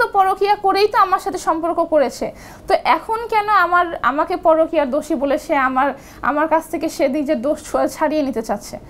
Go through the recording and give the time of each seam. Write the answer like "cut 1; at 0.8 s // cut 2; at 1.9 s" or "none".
none